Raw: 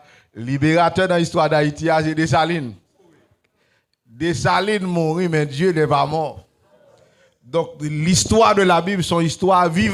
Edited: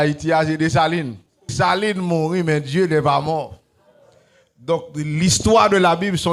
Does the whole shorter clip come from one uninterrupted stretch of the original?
no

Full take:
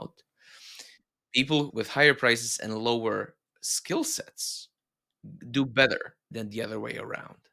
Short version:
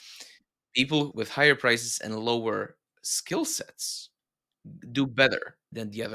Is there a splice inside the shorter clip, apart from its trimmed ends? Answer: no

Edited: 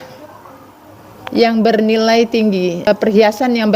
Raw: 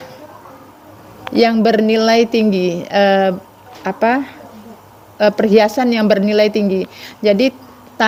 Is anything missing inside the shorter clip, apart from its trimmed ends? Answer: yes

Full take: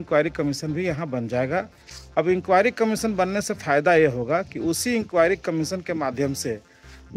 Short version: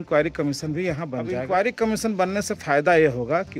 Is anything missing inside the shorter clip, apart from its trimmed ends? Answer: yes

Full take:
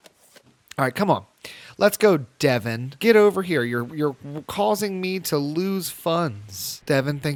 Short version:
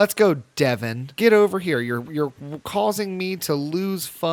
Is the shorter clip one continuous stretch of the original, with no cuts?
yes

